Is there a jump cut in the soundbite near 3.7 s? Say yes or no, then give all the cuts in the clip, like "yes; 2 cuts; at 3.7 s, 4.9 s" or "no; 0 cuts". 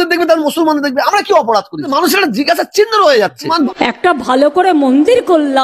yes; 1 cut; at 3.7 s